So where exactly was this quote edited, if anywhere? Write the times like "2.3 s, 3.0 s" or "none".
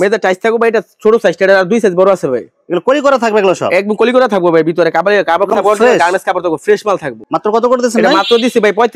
none